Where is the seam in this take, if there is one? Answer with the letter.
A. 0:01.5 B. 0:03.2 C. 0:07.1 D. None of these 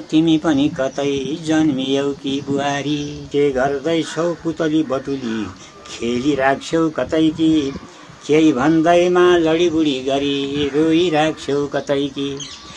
B